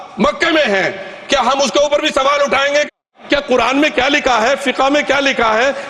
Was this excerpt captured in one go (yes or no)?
no